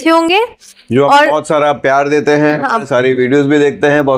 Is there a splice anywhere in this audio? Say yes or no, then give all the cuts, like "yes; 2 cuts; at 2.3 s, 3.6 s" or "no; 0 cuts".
no; 0 cuts